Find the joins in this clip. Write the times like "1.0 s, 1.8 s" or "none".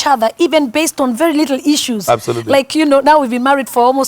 none